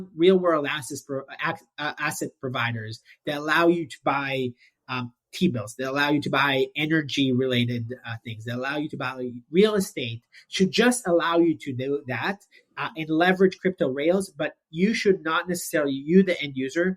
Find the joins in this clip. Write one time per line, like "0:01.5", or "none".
none